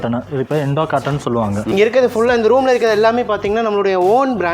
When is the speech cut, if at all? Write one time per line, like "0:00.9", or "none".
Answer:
0:01.7